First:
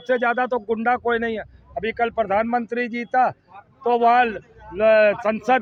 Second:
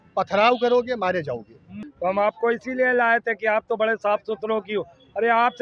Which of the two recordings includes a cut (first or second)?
second